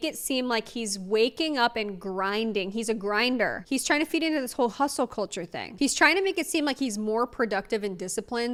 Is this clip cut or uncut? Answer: uncut